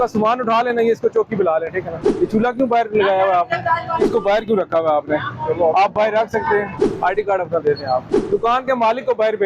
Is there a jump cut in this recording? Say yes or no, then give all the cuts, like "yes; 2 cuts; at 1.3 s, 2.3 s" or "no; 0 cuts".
yes; 4 cuts; at 2.0 s, 4.1 s, 6.8 s, 8.1 s